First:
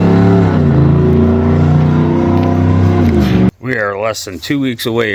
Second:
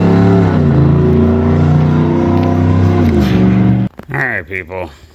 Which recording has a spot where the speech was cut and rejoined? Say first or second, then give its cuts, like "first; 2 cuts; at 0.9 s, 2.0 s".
first; 1 cut; at 3.5 s